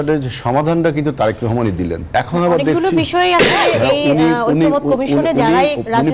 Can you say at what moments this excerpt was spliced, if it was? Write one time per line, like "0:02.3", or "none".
0:02.0